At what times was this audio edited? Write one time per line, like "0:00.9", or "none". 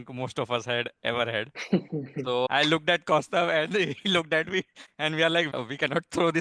0:02.5
0:05.5